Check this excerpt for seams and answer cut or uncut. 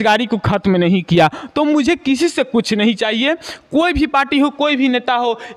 uncut